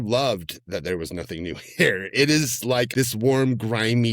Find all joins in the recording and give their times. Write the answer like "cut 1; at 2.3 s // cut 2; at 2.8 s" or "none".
cut 1; at 2.9 s